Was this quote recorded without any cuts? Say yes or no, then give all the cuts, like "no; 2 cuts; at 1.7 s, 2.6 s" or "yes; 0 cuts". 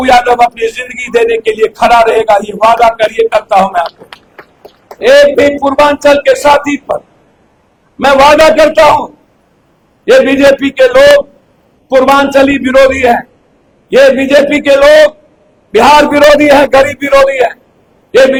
yes; 0 cuts